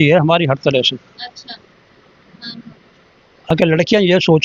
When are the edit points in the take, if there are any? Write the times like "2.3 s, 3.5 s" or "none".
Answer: none